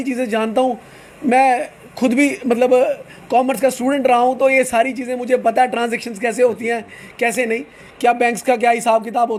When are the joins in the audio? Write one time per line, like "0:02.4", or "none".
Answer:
none